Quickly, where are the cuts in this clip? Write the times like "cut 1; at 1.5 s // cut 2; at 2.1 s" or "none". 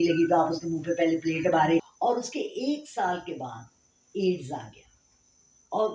cut 1; at 1.9 s